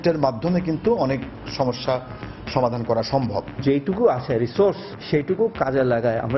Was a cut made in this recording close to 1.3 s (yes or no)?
no